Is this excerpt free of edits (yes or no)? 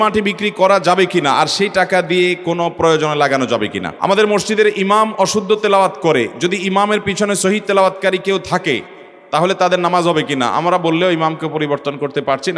no